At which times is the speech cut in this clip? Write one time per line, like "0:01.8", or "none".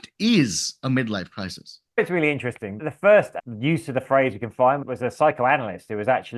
none